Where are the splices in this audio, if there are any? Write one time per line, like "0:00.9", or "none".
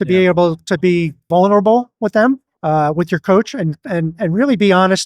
0:01.2
0:02.5